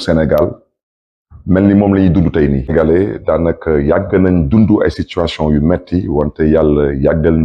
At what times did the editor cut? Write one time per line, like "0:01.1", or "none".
0:02.7